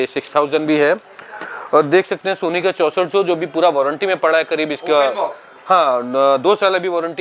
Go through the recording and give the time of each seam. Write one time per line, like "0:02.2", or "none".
none